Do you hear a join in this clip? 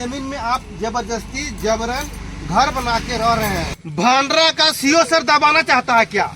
yes; 1 cut; at 3.7 s

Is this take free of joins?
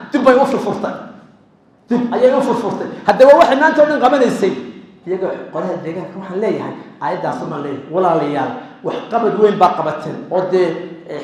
yes; 0 cuts

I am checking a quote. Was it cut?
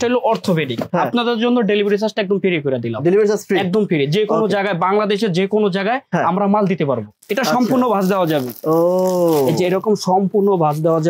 yes; 2 cuts; at 0.8 s, 7.0 s

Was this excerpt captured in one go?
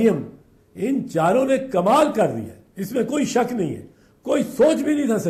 yes; 0 cuts

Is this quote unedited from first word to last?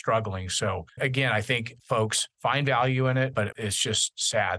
no; 3 cuts; at 0.9 s, 1.8 s, 3.5 s

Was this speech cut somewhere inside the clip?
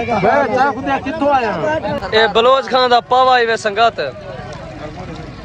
no; 0 cuts

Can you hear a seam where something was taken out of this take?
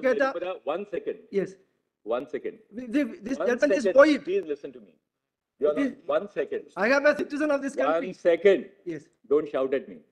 no; 0 cuts

